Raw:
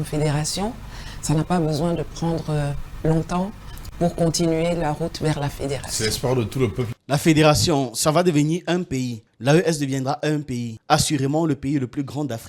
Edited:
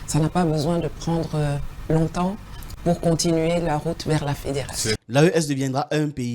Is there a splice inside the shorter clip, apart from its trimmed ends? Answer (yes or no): yes